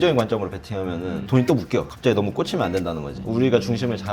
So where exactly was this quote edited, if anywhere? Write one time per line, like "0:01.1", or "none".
0:01.9
0:03.2